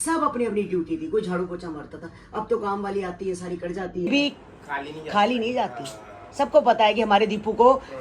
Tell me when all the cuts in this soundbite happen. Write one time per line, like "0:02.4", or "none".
0:04.1